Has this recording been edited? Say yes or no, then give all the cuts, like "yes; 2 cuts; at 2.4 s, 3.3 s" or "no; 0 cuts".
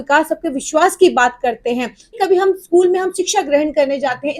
yes; 1 cut; at 2.2 s